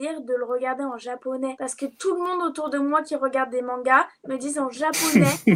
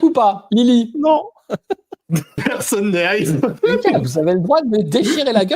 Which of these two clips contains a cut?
second; 2 cuts; at 2.4 s, 3.6 s

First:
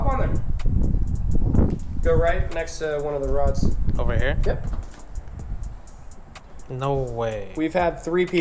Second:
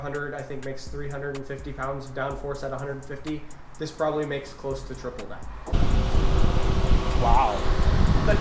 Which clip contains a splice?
second; 1 cut; at 5.7 s

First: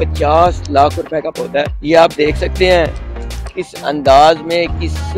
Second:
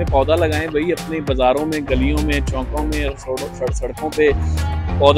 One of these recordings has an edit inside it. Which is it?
first; 1 cut; at 1.8 s

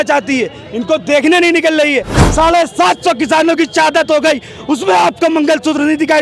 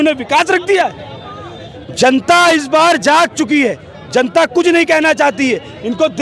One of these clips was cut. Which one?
first; 1 cut; at 2.1 s

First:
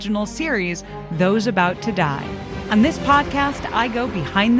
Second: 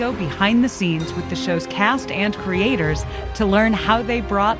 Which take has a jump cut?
first; 1 cut; at 2.5 s

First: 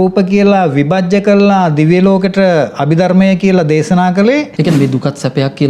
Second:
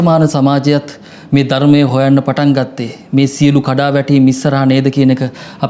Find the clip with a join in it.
first; 1 cut; at 4.5 s

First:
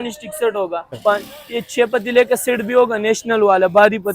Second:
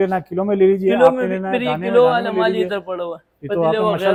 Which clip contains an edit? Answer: first; 1 cut; at 1.0 s

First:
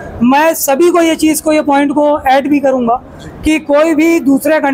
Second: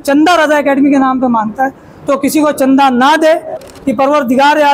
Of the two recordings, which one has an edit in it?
second; 1 cut; at 3.7 s

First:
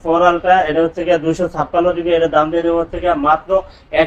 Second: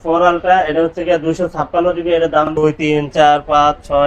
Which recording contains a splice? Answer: second; 1 cut; at 2.5 s

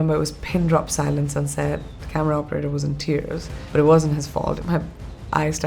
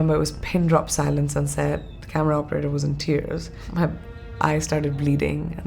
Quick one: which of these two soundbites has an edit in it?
second; 1 cut; at 3.7 s

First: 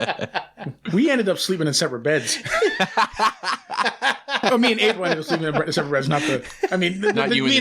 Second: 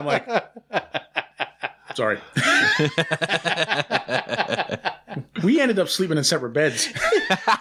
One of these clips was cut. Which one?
first; 1 cut; at 4.3 s

